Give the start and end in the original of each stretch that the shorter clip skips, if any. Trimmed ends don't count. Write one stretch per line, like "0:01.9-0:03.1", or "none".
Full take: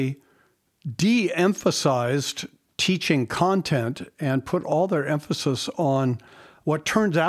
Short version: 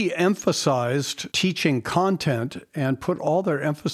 0:02.4-0:02.7